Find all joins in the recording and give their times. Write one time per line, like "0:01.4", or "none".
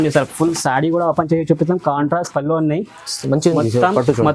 none